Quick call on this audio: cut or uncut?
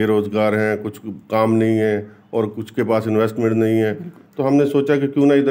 uncut